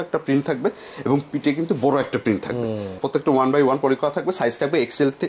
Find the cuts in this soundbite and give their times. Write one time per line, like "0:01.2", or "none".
none